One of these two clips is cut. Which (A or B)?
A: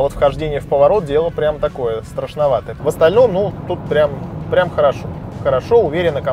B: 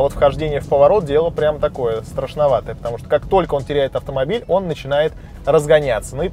A